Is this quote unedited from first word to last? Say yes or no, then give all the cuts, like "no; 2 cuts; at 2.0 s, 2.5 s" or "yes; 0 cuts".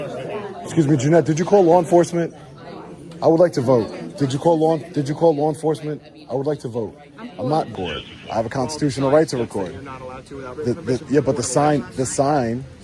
no; 1 cut; at 7.7 s